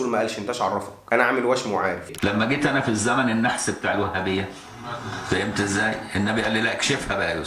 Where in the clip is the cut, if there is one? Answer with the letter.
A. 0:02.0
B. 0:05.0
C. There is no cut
A